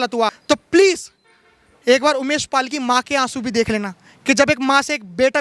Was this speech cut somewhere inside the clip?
no; 0 cuts

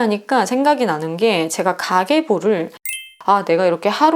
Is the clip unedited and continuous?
no; 1 cut; at 2.9 s

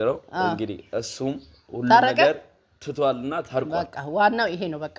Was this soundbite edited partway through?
no; 0 cuts

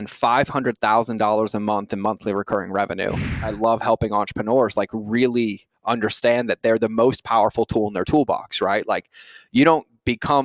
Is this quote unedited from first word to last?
no; 1 cut; at 3.5 s

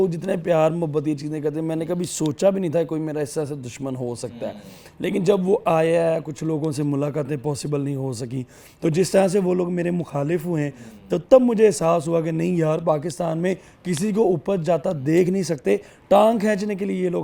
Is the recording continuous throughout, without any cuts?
yes; 0 cuts

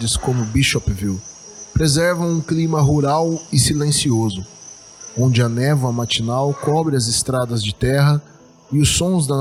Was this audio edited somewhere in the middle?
no; 0 cuts

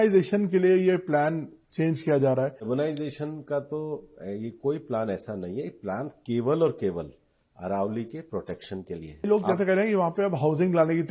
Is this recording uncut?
no; 2 cuts; at 2.7 s, 9.3 s

